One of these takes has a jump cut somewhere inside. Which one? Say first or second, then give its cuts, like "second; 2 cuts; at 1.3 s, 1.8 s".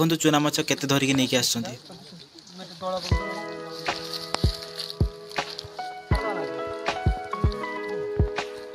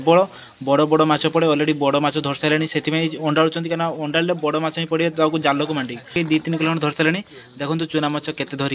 second; 1 cut; at 6.1 s